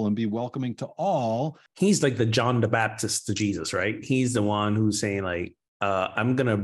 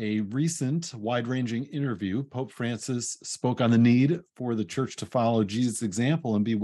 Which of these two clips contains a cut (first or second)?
first